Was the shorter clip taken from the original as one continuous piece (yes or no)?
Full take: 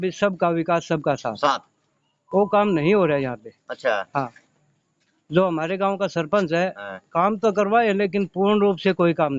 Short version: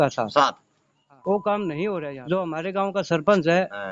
no